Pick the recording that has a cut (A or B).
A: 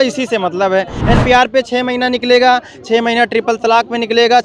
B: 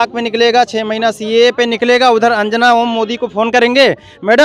A